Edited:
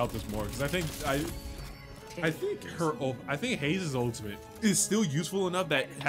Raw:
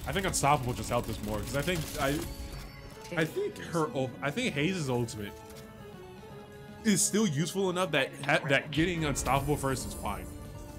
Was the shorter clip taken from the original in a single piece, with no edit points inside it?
no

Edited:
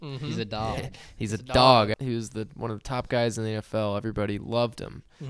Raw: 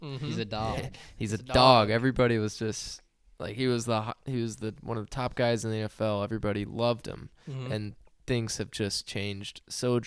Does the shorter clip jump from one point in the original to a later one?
yes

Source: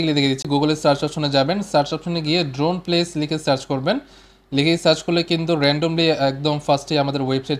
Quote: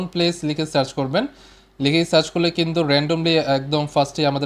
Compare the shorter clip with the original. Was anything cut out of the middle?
no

